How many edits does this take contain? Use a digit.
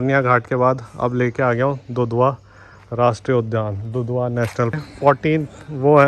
1